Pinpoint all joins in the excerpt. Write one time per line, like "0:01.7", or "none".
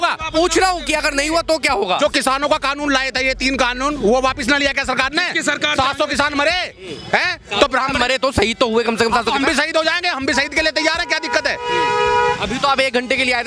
none